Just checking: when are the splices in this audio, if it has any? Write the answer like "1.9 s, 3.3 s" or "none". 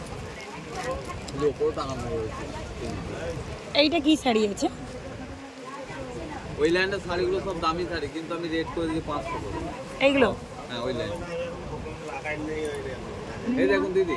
none

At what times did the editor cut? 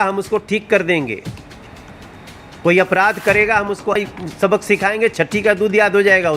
4.0 s

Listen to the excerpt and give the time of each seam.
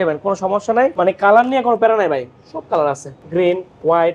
0.9 s

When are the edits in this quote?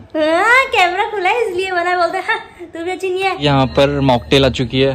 3.4 s

